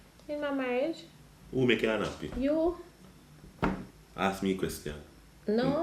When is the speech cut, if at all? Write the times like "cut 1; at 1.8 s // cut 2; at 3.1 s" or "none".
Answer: cut 1; at 4.0 s

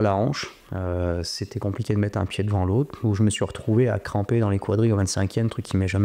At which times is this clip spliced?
cut 1; at 2.9 s

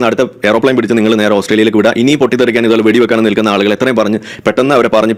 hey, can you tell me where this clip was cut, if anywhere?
none

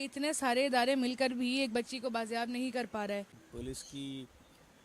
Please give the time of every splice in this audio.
cut 1; at 3.4 s

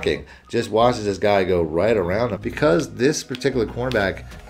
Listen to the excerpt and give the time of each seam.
cut 1; at 2.4 s

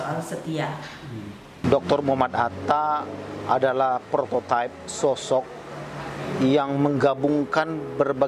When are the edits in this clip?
cut 1; at 1.6 s

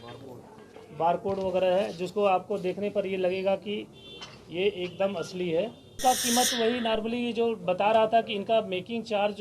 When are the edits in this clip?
cut 1; at 6.0 s

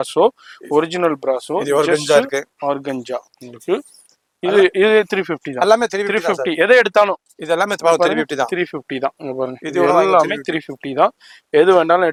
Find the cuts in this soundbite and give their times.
none

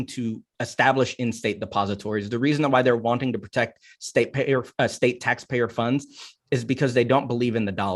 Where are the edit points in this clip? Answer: none

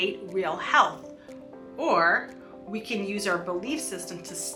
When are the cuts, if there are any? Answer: none

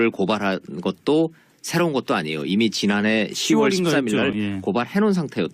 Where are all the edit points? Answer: cut 1; at 2.4 s

